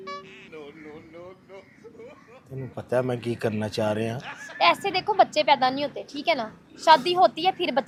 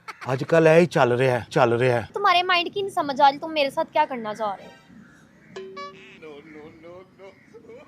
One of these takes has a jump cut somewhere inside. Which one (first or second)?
second